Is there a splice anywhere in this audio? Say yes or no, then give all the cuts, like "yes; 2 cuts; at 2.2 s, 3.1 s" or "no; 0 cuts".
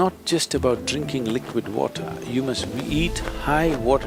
no; 0 cuts